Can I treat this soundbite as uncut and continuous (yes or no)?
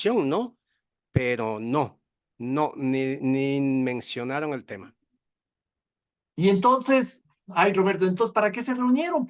yes